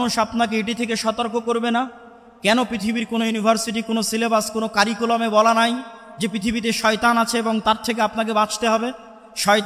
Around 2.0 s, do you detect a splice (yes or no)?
no